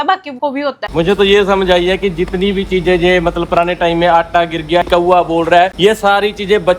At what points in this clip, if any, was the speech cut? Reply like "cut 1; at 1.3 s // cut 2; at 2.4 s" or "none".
cut 1; at 0.9 s // cut 2; at 4.9 s